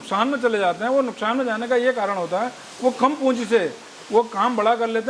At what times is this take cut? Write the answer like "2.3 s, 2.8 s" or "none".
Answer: none